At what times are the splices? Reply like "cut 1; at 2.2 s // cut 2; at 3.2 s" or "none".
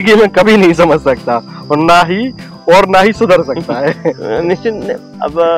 none